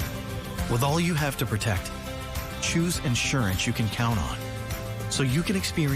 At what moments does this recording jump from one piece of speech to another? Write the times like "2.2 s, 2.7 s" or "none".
none